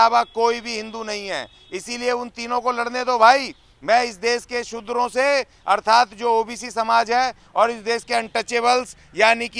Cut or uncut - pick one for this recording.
uncut